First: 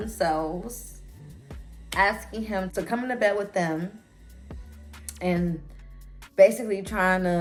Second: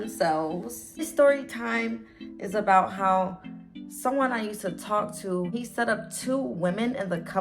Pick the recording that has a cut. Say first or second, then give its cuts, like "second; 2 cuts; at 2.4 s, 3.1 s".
second; 2 cuts; at 1.1 s, 5.5 s